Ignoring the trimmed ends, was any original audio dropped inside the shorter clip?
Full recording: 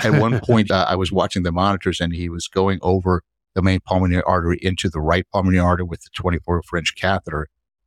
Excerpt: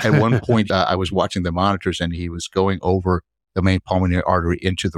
no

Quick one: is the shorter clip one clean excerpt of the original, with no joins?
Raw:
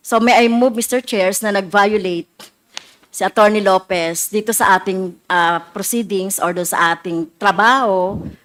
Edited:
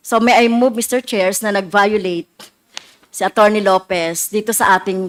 yes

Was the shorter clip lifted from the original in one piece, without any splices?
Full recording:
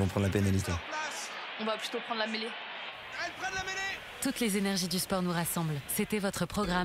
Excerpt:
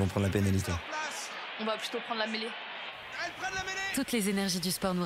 no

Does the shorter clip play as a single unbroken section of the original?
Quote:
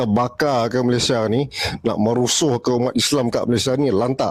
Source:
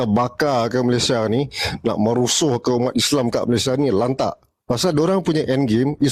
yes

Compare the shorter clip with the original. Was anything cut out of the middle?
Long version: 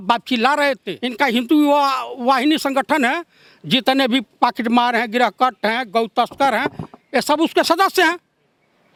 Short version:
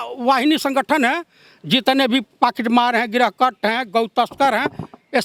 no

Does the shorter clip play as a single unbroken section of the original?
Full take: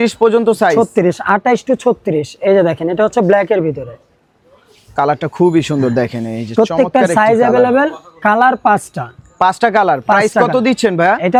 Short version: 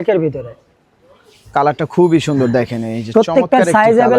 yes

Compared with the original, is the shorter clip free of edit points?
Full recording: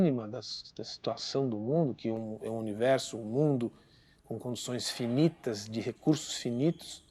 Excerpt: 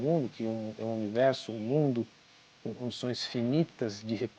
yes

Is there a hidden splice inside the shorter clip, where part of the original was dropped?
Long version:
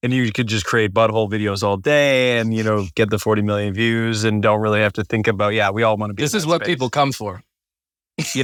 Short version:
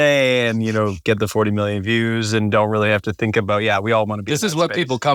no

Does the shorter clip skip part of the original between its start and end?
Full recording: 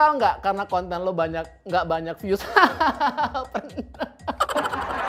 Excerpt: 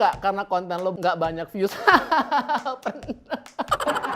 yes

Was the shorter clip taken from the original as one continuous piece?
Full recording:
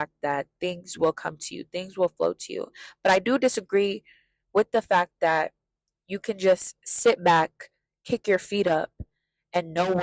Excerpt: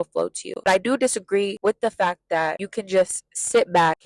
no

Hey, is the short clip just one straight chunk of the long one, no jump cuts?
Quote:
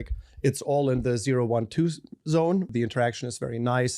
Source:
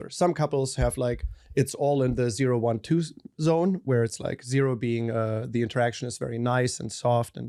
no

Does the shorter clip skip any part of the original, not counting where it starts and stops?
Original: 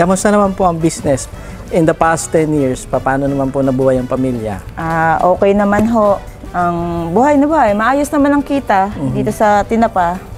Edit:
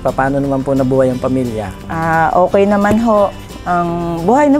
no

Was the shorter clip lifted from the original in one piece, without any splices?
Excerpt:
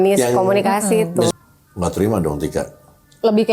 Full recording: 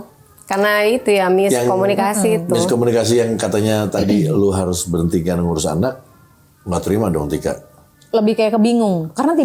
no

